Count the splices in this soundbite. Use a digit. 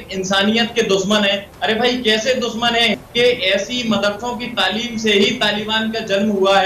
1